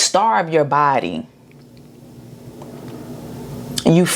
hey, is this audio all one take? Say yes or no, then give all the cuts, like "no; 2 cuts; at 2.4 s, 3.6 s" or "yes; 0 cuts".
yes; 0 cuts